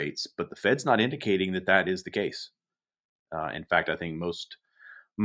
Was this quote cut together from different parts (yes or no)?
no